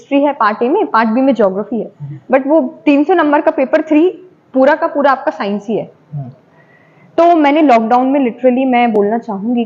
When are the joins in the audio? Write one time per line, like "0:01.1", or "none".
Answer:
none